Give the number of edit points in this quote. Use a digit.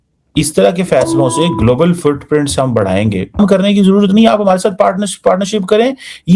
1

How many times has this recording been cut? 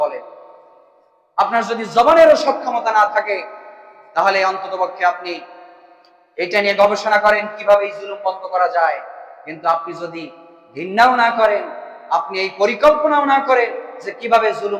0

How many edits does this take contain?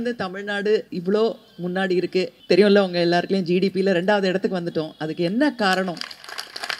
2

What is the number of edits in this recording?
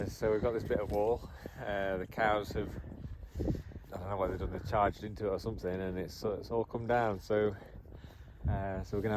0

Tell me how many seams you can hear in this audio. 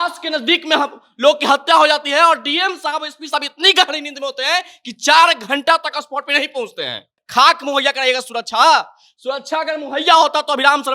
1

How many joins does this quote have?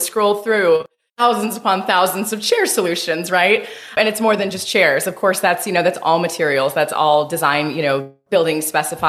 2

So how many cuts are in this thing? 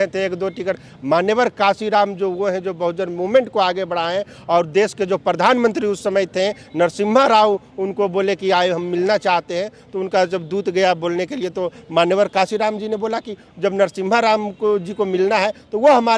0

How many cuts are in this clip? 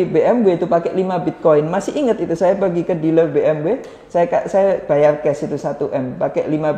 0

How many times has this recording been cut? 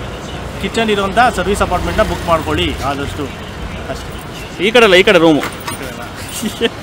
0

